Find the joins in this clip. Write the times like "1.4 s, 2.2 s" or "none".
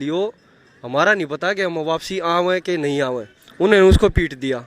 3.4 s